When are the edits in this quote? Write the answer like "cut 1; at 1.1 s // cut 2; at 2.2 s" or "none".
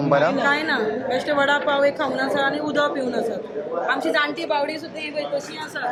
none